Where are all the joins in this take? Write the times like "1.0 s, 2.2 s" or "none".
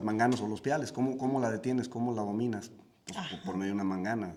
none